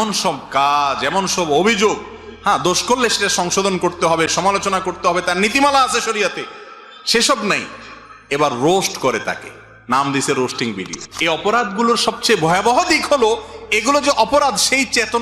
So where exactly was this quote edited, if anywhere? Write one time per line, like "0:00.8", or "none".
0:11.0